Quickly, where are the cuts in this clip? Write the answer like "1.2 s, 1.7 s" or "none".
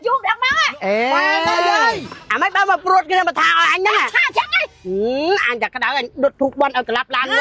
2.2 s, 4.8 s

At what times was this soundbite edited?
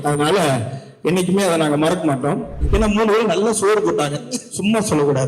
2.6 s

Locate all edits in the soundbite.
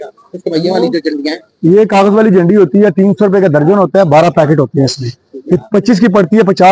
none

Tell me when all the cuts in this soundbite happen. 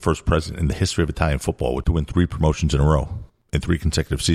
1.8 s

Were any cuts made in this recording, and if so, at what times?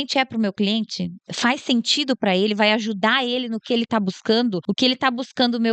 4.7 s

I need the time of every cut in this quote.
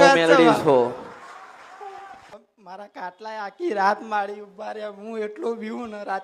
2.2 s

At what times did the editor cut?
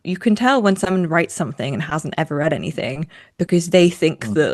none

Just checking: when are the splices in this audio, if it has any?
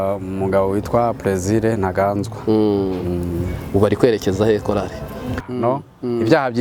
5.5 s

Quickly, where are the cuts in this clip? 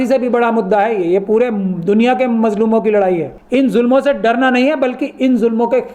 3.3 s

